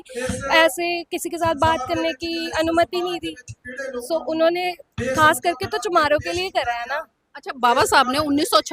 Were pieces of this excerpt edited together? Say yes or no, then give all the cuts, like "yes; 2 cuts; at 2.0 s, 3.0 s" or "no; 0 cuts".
no; 0 cuts